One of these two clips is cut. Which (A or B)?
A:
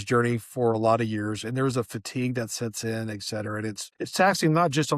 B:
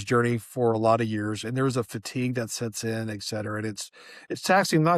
A